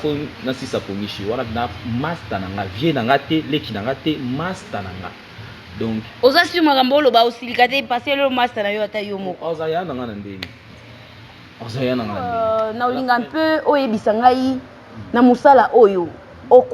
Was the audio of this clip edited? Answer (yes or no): yes